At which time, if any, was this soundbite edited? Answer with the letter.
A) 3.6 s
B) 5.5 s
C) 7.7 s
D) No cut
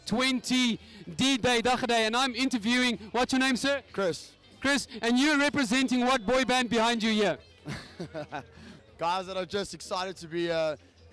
A